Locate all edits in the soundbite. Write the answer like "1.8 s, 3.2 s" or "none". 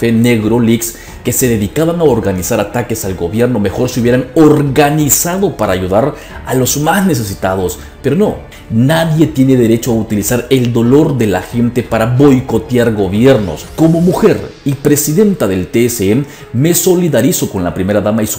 8.5 s, 13.6 s